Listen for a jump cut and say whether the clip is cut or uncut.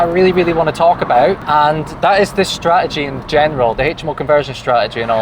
cut